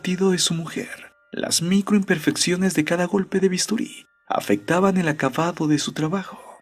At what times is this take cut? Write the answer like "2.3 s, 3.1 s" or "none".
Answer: 2.0 s